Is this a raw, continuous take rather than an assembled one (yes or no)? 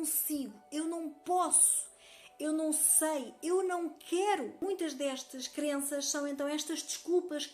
no